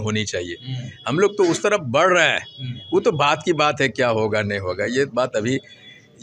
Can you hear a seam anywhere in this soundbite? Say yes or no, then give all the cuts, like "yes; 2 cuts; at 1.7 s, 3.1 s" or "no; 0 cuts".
no; 0 cuts